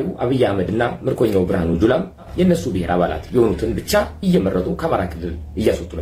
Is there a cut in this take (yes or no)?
yes